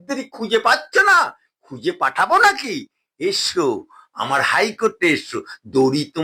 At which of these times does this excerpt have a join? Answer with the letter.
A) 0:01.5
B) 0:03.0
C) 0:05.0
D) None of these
D